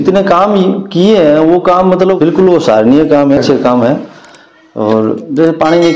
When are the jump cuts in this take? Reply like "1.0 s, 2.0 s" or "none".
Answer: 3.4 s